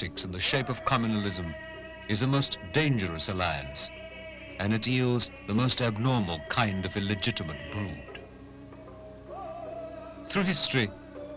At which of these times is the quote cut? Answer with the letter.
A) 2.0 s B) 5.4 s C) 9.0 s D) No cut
B